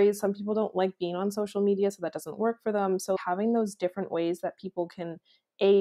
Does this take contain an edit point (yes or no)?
yes